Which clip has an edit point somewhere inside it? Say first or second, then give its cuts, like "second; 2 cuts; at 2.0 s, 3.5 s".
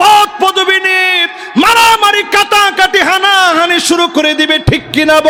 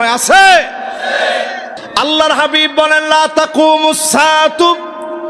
second; 1 cut; at 1.7 s